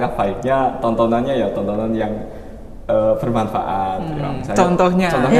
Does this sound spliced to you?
no; 0 cuts

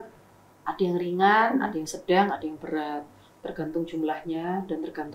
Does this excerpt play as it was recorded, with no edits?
yes; 0 cuts

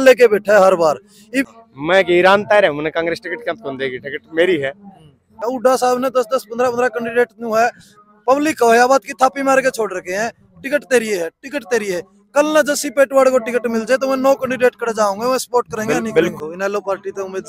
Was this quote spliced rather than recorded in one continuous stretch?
yes; 3 cuts; at 1.5 s, 5.4 s, 16.3 s

